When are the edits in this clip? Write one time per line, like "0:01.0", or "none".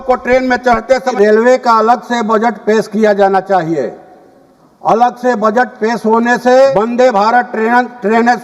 0:01.1
0:06.7